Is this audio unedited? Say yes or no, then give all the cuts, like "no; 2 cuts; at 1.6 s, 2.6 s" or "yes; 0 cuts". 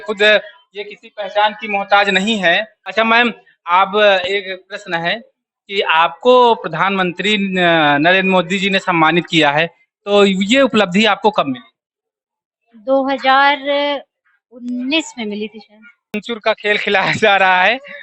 no; 2 cuts; at 2.8 s, 16.2 s